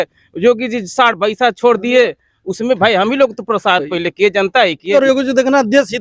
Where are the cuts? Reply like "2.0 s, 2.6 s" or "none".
4.9 s